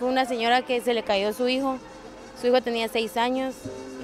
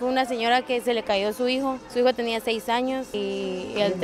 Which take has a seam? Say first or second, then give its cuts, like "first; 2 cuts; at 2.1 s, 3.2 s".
second; 2 cuts; at 1.8 s, 3.1 s